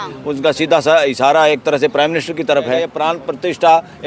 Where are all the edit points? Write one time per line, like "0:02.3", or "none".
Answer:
0:02.9